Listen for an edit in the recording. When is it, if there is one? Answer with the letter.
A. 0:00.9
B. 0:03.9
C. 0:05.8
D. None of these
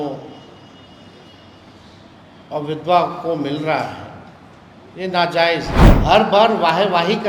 C